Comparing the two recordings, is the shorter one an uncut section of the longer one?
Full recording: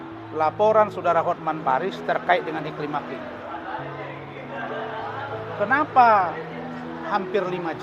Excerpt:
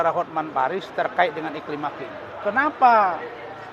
no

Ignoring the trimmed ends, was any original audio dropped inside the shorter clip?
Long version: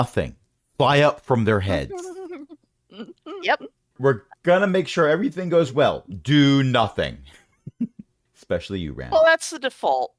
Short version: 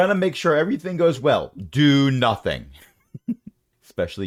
no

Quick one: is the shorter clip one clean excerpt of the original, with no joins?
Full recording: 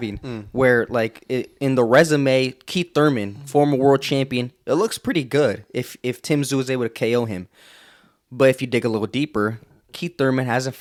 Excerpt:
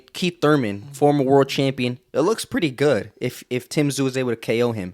yes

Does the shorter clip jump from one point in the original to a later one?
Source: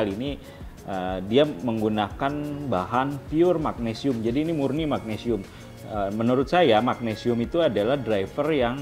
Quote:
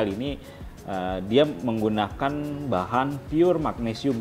no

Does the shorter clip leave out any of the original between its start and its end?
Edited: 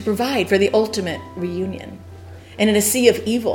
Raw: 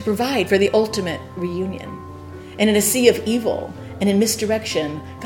no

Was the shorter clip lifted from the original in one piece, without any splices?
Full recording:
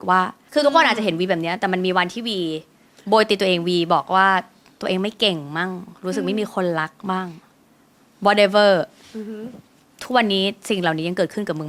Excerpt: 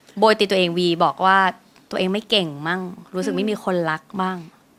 yes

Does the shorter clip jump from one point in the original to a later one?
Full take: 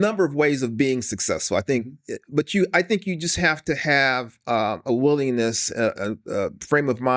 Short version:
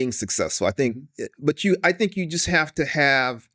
no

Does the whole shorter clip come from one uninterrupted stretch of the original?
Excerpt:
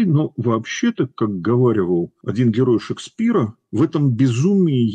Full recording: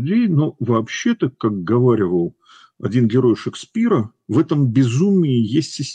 no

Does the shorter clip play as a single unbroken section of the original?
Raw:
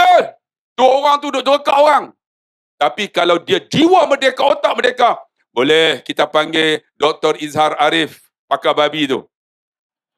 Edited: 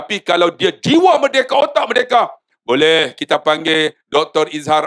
yes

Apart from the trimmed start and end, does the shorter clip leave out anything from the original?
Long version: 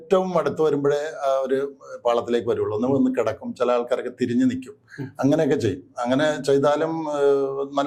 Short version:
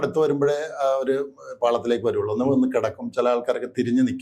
no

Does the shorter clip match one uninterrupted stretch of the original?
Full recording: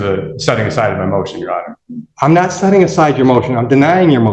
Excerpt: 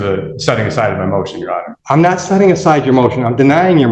no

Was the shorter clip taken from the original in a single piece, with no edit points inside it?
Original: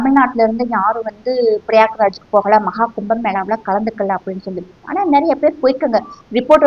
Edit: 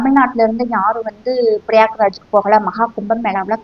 yes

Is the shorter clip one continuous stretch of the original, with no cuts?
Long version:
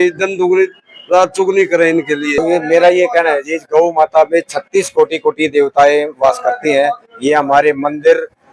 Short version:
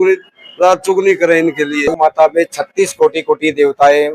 no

